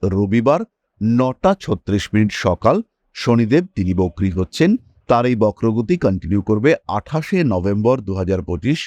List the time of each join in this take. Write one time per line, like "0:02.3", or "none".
none